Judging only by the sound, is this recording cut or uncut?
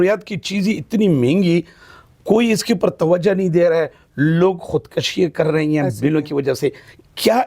uncut